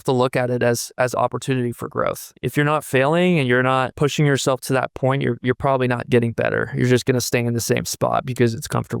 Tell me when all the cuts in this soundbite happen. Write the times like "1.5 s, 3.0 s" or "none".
2.3 s